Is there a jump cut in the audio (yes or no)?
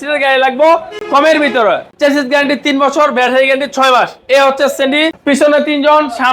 yes